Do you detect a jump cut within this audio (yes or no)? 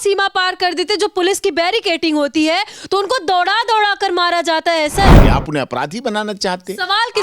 yes